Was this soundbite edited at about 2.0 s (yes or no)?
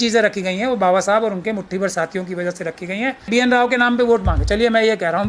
no